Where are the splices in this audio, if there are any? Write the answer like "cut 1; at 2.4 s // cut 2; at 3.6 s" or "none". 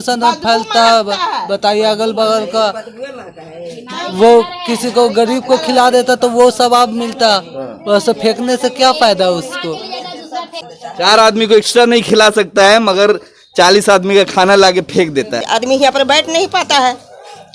cut 1; at 10.6 s // cut 2; at 15.4 s